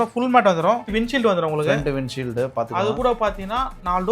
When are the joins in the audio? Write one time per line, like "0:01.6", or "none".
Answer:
0:00.9